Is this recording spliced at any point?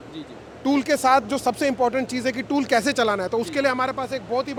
no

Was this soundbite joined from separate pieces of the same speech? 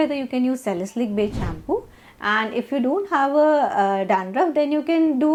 no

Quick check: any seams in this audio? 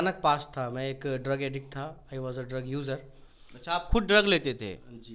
no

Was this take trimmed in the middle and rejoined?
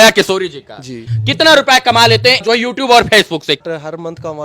yes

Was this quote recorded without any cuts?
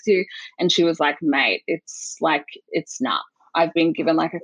yes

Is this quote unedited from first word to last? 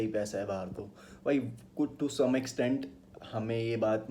yes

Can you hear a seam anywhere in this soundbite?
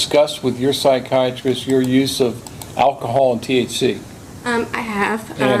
no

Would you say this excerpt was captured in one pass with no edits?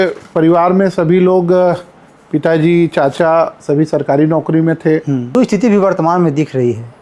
no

